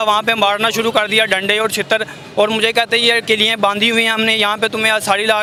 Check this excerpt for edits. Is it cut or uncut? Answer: uncut